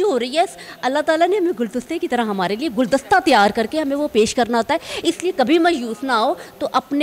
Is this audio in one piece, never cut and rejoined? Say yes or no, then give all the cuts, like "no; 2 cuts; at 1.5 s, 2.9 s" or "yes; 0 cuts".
yes; 0 cuts